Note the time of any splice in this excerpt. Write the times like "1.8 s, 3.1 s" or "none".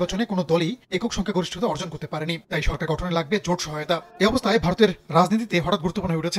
none

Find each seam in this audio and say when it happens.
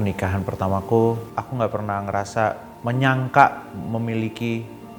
1.2 s, 2.7 s

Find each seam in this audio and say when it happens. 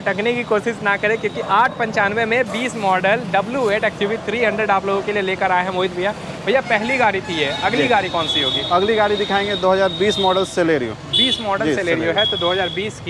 none

